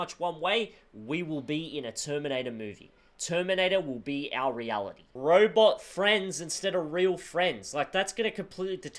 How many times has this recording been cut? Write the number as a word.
one